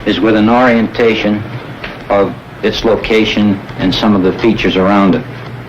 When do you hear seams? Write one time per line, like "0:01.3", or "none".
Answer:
0:04.2

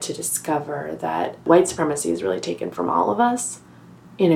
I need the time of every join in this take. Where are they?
0:01.4

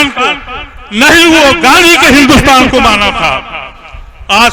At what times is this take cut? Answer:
none

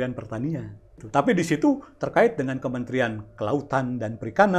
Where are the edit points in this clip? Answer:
0:01.0

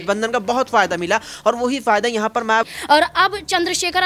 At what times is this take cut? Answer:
0:02.6

